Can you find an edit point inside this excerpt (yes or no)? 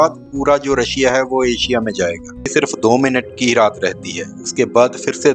yes